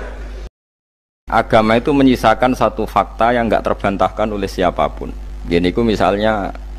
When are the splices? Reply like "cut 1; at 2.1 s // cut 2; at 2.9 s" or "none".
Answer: cut 1; at 1.0 s